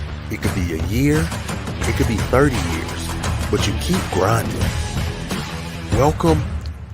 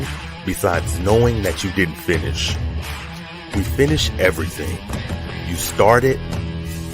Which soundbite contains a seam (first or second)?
first